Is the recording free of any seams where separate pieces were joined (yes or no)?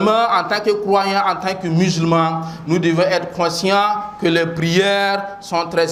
yes